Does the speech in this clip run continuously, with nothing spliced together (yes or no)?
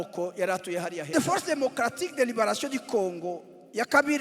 no